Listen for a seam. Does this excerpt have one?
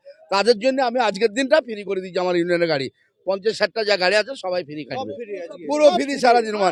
no; 0 cuts

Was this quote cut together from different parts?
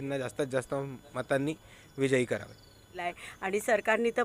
yes; 1 cut; at 3.0 s

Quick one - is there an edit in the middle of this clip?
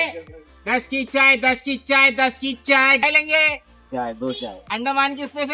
yes; 1 cut; at 4.6 s

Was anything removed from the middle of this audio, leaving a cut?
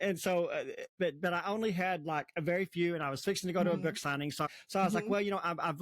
yes; 2 cuts; at 0.9 s, 4.5 s

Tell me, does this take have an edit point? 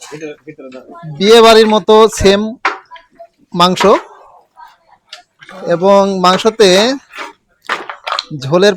no; 0 cuts

